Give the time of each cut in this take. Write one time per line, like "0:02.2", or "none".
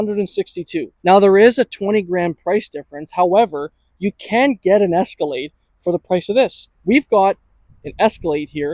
0:00.9
0:06.7